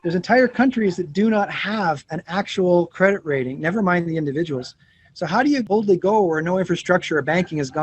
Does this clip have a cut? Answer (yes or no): yes